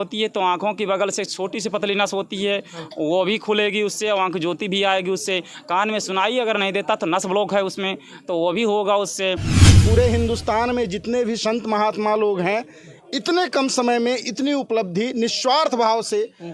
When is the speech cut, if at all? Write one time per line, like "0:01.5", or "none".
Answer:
0:09.6